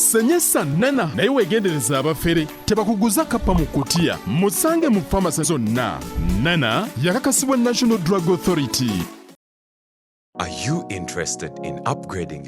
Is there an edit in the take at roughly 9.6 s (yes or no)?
yes